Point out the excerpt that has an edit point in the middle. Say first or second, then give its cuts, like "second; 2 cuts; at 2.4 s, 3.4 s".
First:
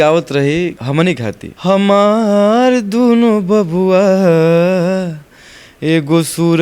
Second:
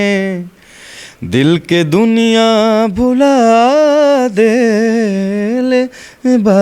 first; 1 cut; at 1.1 s